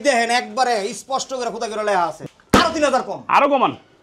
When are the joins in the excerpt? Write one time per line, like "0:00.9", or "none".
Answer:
0:02.2